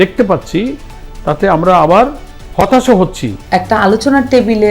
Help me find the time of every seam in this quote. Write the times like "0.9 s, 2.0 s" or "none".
3.4 s